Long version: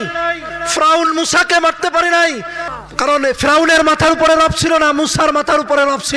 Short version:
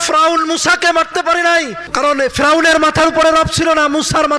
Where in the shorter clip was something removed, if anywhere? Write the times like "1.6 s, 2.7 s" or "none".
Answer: 1.8 s